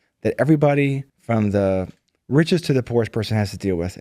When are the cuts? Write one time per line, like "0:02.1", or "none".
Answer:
0:01.1